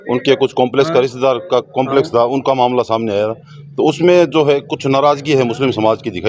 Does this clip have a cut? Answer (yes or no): no